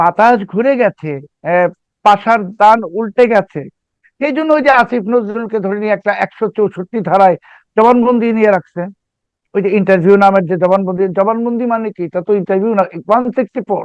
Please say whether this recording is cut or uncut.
cut